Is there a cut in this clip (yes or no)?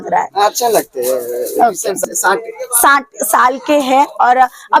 yes